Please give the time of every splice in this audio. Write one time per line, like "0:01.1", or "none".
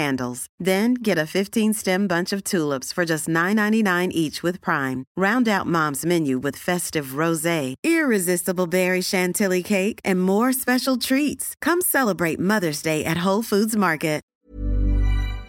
0:14.2